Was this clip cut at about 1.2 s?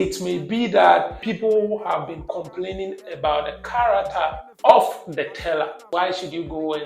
yes; 3 cuts; at 1.2 s, 4.5 s, 5.9 s

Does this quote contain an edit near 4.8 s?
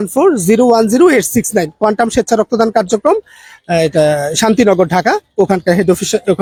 no; 0 cuts

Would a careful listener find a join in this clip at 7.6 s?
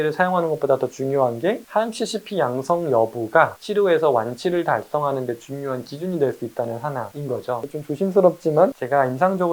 yes; 1 cut; at 7.6 s

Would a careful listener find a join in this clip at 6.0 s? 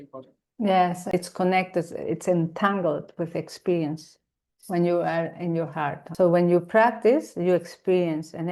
yes; 2 cuts; at 1.1 s, 6.0 s

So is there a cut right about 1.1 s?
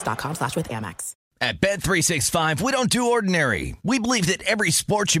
yes; 1 cut; at 1.1 s

